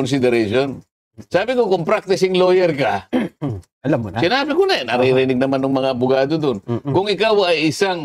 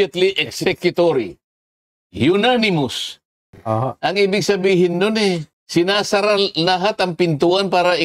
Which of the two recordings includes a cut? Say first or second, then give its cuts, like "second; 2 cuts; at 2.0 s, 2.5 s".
second; 2 cuts; at 3.6 s, 5.5 s